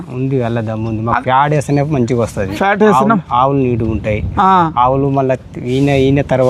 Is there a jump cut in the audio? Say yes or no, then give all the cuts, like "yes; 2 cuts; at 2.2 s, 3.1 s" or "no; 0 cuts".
no; 0 cuts